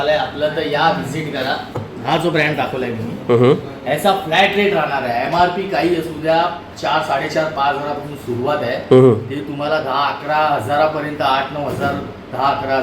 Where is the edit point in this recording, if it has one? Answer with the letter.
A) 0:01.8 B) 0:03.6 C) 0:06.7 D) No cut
A